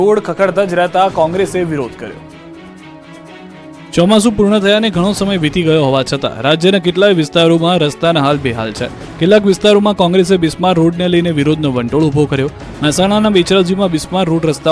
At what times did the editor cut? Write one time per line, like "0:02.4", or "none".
none